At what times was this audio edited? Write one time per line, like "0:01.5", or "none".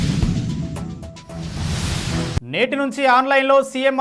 0:02.4